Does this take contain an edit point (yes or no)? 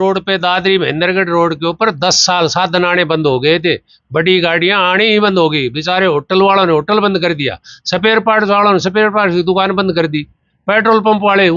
no